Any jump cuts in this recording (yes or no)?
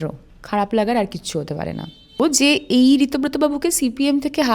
yes